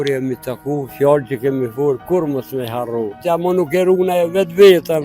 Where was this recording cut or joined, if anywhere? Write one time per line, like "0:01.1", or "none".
0:03.2

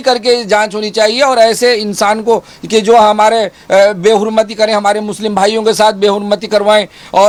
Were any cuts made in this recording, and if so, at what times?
none

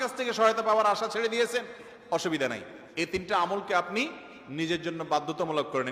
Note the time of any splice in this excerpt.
none

